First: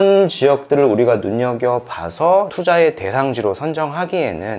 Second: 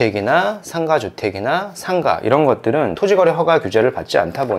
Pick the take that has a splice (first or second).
second